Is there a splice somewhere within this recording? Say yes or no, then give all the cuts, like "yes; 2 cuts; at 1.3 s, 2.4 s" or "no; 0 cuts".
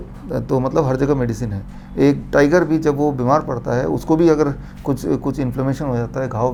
no; 0 cuts